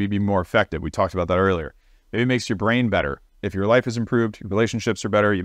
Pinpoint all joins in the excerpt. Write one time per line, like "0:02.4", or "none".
0:03.2